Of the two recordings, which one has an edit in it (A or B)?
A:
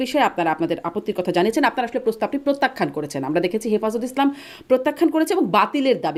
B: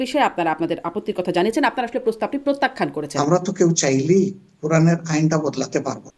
B